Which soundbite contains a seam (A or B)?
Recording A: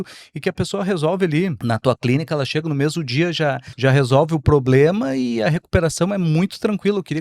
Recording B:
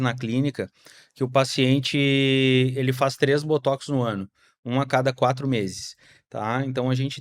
A